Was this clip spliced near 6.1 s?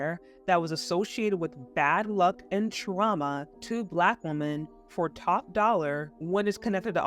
yes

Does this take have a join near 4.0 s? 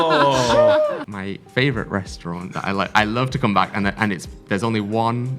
no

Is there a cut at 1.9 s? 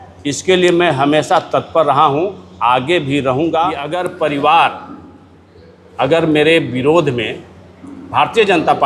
no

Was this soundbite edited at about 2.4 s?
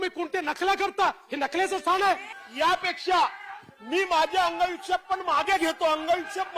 yes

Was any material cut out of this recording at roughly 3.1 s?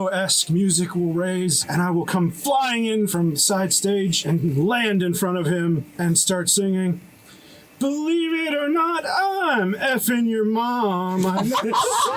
yes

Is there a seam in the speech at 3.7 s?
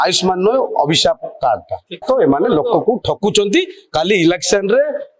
no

